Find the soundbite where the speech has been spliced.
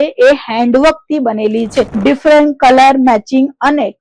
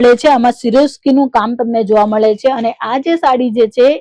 first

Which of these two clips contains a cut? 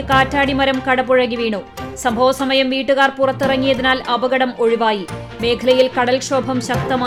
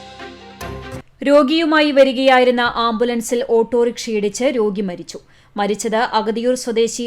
second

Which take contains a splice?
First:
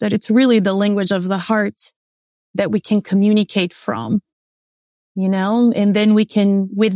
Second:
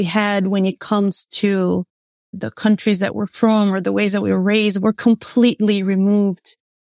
second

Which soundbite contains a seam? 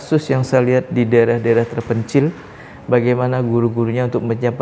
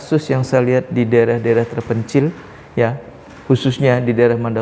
first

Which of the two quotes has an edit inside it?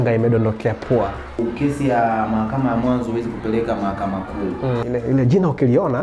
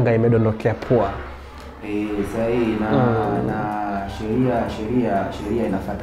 first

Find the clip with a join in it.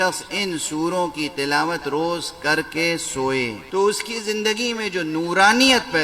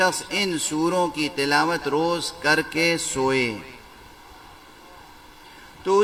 first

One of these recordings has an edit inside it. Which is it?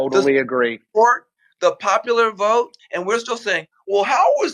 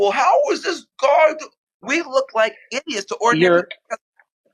first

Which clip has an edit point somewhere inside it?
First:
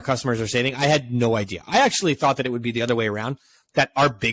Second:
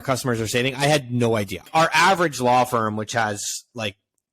second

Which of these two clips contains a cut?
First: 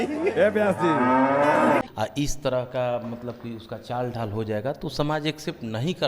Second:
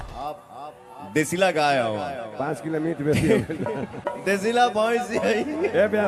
first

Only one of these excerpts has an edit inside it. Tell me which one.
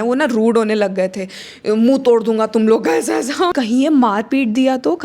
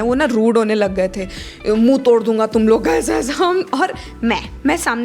first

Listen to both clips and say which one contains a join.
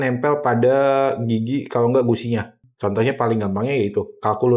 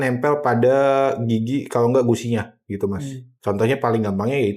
first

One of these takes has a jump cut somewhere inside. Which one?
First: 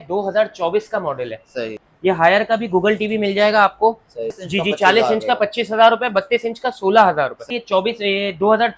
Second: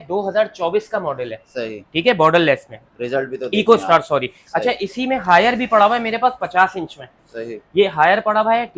first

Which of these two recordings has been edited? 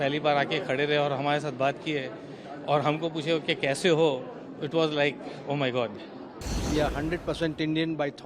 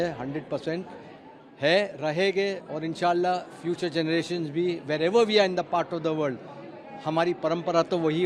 first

